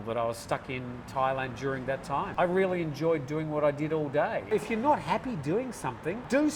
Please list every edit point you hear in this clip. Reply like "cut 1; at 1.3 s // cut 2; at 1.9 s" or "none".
cut 1; at 2.3 s // cut 2; at 4.5 s